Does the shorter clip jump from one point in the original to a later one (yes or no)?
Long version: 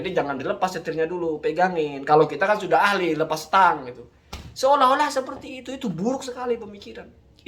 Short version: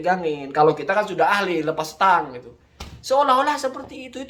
no